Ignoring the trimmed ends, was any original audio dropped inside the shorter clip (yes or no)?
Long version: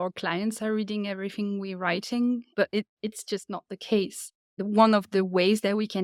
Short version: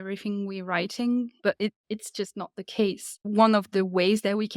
yes